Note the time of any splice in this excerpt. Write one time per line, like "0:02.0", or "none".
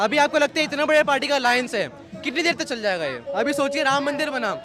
0:03.2